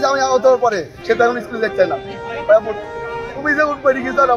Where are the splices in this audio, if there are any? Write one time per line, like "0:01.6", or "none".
0:00.9